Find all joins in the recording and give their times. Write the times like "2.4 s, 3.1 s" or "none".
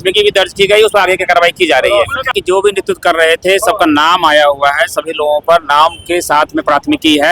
2.3 s